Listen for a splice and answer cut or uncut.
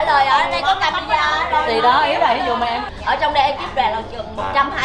cut